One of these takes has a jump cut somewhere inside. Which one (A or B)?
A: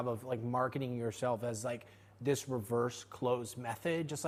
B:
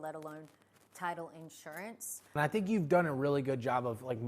B